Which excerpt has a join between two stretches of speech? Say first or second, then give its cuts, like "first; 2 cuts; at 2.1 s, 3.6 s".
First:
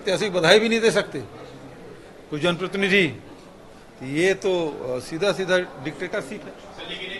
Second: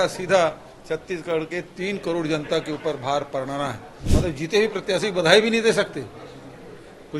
second; 1 cut; at 3.9 s